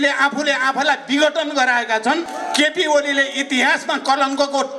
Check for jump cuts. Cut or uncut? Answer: cut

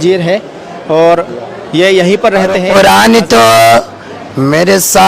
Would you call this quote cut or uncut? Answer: cut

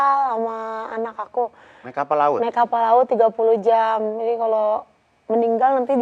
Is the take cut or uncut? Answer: uncut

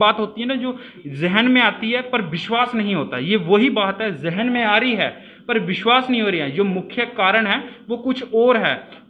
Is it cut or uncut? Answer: uncut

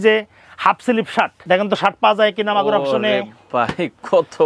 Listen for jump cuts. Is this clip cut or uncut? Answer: cut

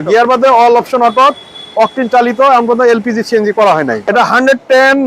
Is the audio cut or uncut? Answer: cut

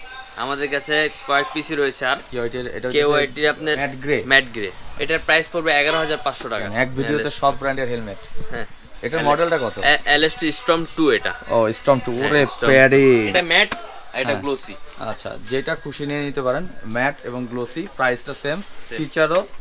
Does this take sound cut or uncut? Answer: cut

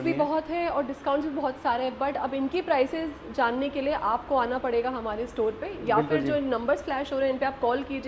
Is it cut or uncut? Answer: uncut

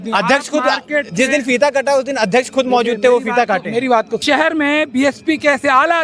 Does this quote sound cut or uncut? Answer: cut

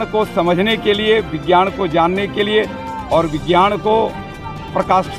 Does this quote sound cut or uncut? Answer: uncut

